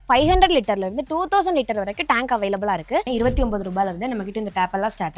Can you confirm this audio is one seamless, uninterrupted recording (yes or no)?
no